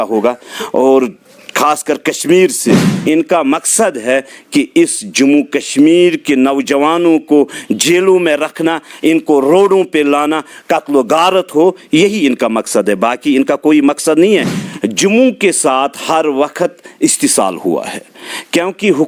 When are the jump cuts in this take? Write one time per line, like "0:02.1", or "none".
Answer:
0:02.9
0:14.6